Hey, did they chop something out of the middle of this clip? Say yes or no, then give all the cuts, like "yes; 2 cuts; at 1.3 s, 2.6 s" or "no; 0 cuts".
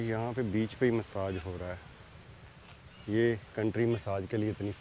no; 0 cuts